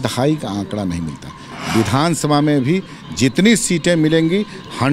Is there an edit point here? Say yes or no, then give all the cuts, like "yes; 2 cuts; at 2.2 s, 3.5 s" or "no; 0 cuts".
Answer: yes; 1 cut; at 1.5 s